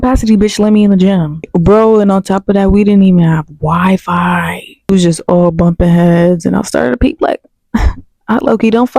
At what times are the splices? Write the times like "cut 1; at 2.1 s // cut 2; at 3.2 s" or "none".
cut 1; at 1.5 s // cut 2; at 4.9 s